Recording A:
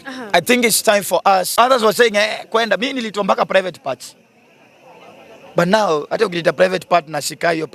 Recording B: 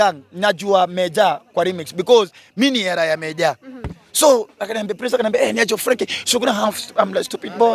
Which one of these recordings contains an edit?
A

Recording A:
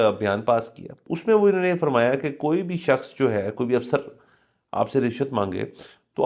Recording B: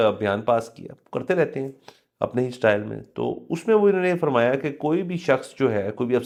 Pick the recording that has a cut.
A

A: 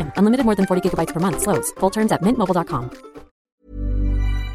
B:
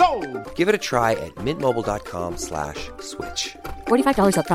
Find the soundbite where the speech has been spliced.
A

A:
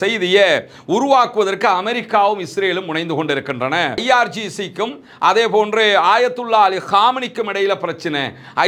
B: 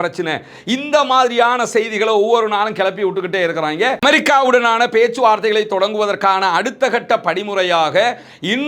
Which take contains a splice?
B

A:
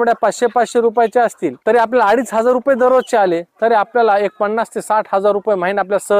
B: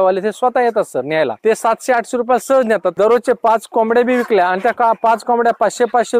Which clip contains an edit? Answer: B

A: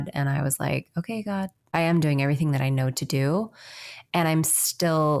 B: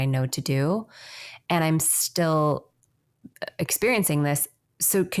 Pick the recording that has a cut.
A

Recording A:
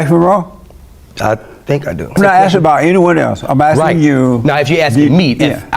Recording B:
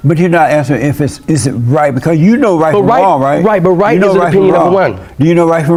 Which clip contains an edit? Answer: A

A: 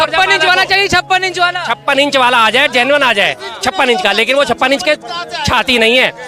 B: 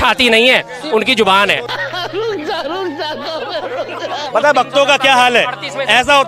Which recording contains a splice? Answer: B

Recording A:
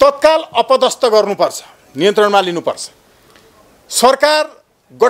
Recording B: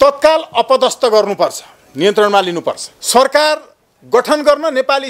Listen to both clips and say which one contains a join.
B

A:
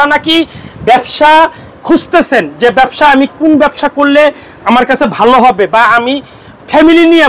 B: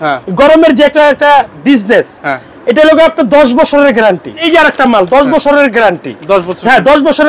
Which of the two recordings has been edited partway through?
B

